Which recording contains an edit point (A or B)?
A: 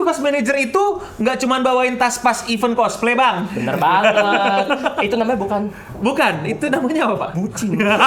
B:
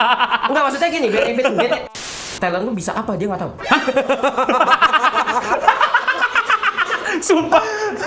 B